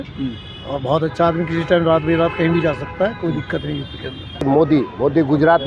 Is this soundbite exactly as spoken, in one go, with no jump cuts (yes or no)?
no